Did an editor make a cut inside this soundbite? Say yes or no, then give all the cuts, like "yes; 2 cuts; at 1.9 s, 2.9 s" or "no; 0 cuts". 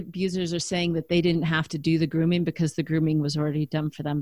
no; 0 cuts